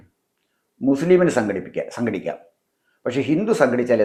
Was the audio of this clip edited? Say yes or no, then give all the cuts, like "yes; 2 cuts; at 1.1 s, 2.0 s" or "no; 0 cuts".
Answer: no; 0 cuts